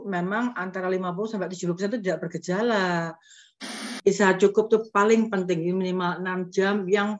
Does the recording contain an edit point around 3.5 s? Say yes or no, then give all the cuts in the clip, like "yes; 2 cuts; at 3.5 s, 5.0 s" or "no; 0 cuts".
yes; 1 cut; at 3.5 s